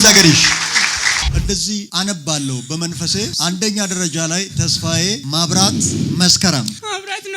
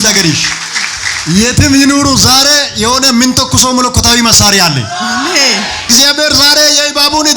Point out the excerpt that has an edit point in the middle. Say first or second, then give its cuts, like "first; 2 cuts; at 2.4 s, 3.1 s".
first; 1 cut; at 1.2 s